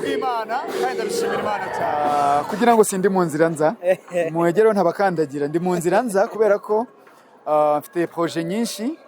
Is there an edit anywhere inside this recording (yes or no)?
yes